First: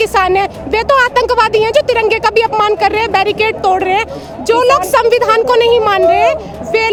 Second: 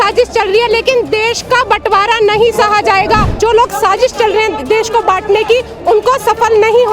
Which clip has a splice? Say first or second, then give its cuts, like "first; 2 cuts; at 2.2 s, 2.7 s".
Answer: second; 1 cut; at 3.3 s